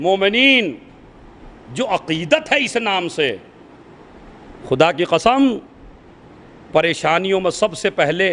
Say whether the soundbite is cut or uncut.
uncut